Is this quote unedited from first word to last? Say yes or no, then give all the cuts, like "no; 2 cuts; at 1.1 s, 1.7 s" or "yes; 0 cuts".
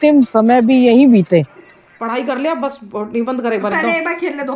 no; 1 cut; at 1.8 s